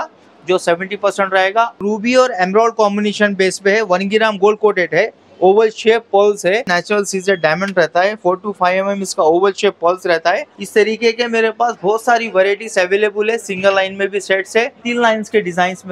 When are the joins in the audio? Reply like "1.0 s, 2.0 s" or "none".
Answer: 1.8 s, 6.7 s, 10.5 s, 14.8 s